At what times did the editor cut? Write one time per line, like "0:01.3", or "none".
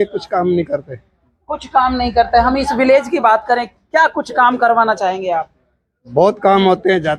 none